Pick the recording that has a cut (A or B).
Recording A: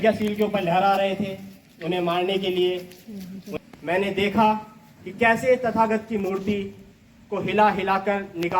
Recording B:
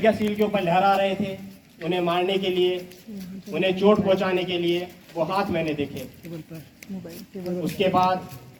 A